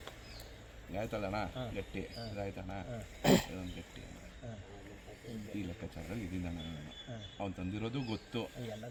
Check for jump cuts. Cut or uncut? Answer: uncut